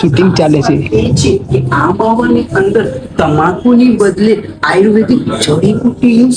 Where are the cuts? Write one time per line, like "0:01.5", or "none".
none